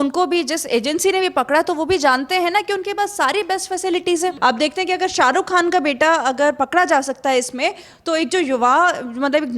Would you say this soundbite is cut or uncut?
cut